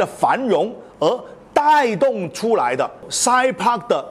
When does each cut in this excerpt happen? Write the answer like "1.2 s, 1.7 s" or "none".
3.1 s